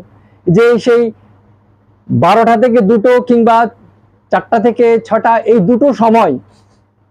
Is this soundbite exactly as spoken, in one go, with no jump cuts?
yes; 0 cuts

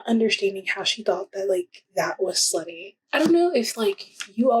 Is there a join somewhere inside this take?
yes; 1 cut; at 3.0 s

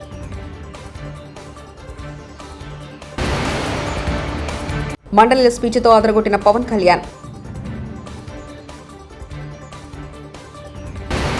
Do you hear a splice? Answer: no; 0 cuts

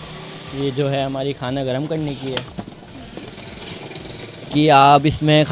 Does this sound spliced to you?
yes; 1 cut; at 4.5 s

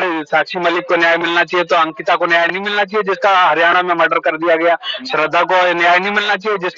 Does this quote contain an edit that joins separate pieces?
no; 0 cuts

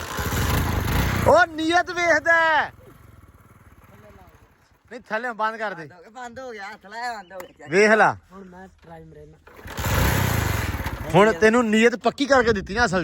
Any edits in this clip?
no; 0 cuts

